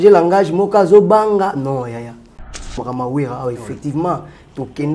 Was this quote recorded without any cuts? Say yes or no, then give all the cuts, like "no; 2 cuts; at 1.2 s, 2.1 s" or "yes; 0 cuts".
no; 1 cut; at 2.8 s